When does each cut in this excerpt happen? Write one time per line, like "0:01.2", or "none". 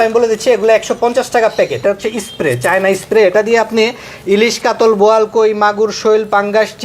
0:01.8